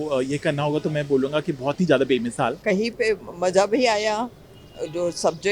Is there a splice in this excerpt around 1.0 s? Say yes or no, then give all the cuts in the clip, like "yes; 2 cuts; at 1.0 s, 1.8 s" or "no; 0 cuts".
no; 1 cut; at 2.6 s